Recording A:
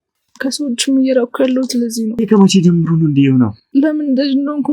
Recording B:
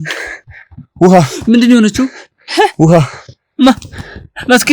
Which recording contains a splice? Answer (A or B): A